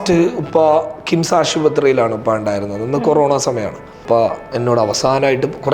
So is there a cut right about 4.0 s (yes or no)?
yes